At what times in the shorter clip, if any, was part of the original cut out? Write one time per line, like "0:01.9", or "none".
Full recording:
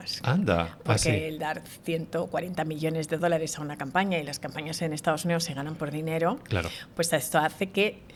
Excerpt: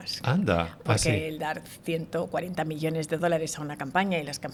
none